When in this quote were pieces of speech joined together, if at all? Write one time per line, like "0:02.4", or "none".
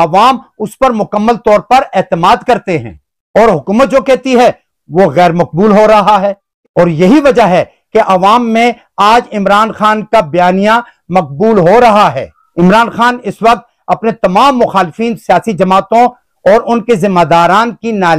0:06.4